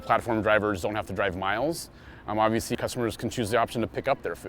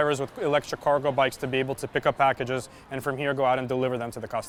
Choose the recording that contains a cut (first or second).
first